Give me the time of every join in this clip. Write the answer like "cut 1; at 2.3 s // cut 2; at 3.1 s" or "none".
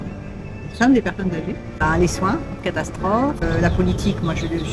cut 1; at 1.7 s // cut 2; at 3.4 s